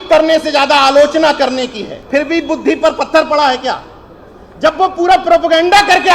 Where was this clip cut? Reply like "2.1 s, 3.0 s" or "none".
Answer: 1.9 s